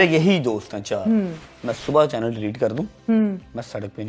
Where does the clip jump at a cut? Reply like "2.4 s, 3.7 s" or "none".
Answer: 1.4 s